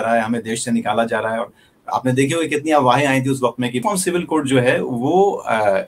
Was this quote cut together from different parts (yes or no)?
yes